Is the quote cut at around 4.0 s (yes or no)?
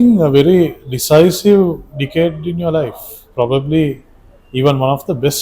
no